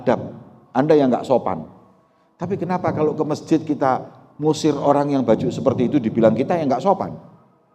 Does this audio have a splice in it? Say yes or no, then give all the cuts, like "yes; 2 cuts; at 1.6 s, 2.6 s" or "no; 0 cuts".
no; 0 cuts